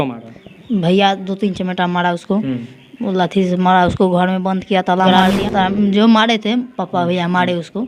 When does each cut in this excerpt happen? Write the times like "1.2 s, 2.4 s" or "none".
5.1 s